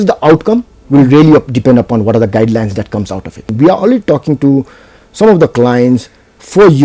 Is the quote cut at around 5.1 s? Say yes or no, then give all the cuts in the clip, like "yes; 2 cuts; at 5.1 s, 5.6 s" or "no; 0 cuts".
no; 1 cut; at 3.5 s